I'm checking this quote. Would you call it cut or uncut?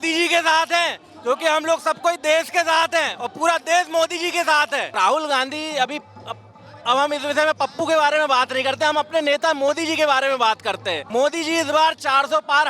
cut